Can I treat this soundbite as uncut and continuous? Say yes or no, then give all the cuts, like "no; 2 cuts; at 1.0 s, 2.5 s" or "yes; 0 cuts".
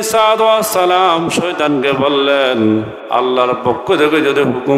yes; 0 cuts